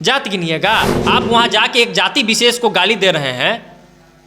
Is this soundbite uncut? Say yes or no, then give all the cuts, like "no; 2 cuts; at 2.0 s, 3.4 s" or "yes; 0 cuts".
no; 1 cut; at 1.0 s